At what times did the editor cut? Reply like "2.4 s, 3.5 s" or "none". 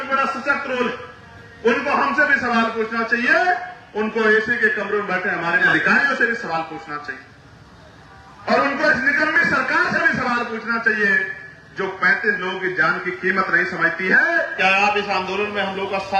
5.7 s, 14.6 s

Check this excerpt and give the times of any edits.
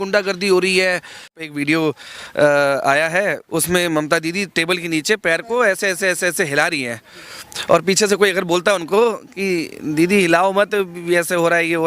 1.5 s, 3.4 s

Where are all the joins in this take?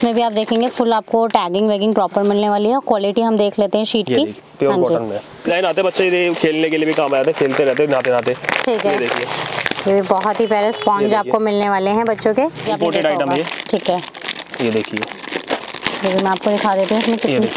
4.4 s, 5.5 s, 12.6 s, 15.9 s

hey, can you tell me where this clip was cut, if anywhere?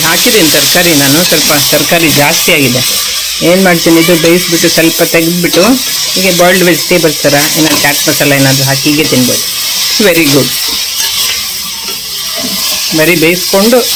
none

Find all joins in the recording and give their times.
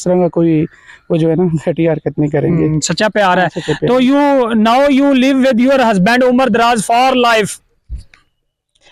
none

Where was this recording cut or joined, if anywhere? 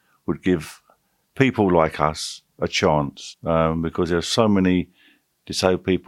3.3 s

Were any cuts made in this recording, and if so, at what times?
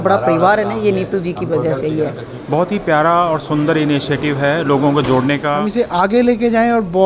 2.7 s, 5.6 s

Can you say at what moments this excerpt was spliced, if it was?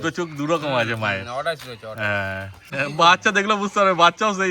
2.6 s

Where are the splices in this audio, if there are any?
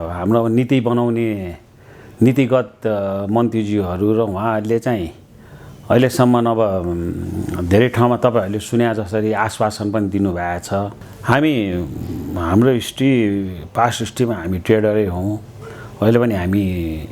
11.0 s

